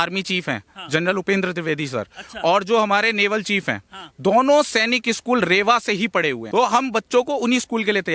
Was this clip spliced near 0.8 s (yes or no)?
no